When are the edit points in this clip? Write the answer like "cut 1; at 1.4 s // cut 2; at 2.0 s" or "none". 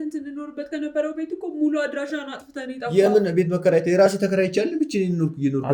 none